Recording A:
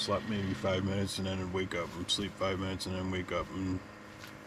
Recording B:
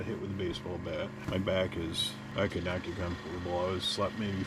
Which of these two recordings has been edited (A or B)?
B